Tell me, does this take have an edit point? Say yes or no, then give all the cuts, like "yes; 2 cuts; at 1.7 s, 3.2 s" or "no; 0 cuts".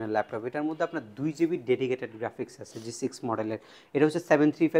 no; 0 cuts